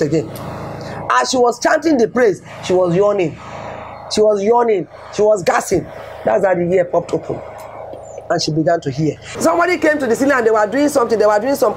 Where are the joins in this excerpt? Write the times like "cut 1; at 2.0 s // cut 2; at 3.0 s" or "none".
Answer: cut 1; at 9.3 s